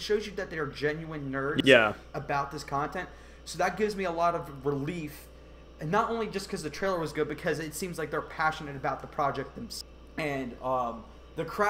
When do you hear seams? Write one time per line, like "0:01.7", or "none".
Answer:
0:09.8